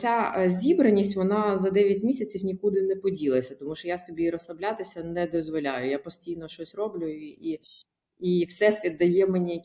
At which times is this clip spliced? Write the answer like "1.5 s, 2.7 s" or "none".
none